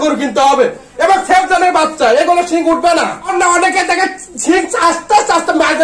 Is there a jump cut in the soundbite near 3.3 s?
yes; 1 cut; at 3.3 s

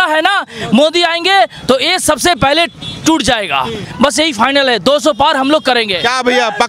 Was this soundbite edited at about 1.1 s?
no; 1 cut; at 3.9 s

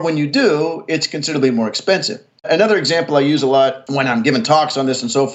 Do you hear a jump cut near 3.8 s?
yes; 2 cuts; at 2.5 s, 3.8 s

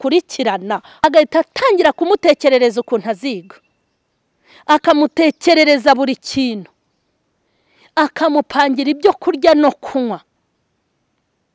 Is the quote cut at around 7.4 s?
no; 1 cut; at 1.0 s

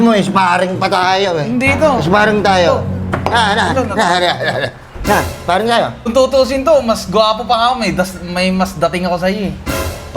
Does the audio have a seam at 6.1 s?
yes; 1 cut; at 6.1 s

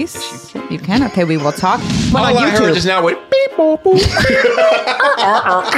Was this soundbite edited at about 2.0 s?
yes; 1 cut; at 2.0 s

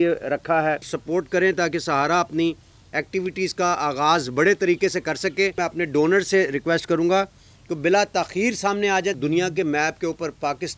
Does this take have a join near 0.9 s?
yes; 3 cuts; at 0.9 s, 5.6 s, 9.2 s

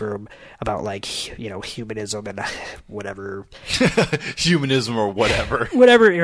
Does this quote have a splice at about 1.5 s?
no; 0 cuts

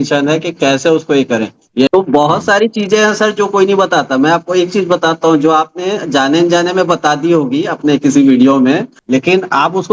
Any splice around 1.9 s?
yes; 2 cuts; at 1.9 s, 8.9 s

